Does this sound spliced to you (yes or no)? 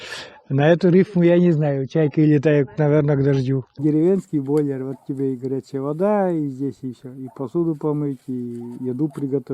yes